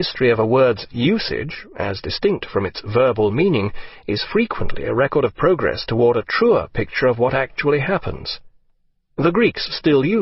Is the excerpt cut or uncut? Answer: uncut